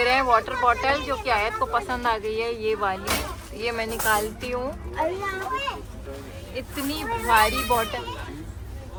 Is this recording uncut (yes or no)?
yes